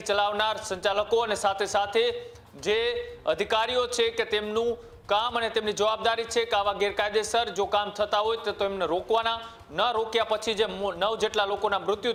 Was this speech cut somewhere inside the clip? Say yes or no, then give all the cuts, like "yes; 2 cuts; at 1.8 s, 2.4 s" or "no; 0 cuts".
no; 0 cuts